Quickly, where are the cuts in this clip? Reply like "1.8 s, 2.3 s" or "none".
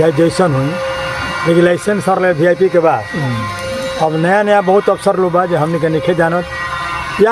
none